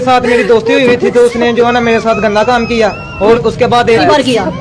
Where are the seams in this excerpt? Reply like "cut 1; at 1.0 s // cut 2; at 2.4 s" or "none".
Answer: cut 1; at 3.3 s